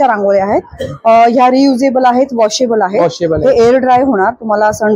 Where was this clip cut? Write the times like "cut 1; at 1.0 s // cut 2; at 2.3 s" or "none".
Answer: none